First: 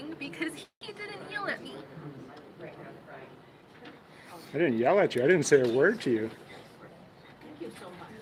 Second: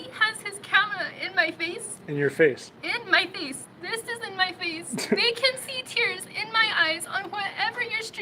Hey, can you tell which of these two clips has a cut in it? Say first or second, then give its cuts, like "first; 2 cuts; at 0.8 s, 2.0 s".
second; 3 cuts; at 1.9 s, 3.7 s, 7.0 s